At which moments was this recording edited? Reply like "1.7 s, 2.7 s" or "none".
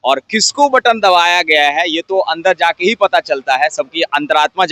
none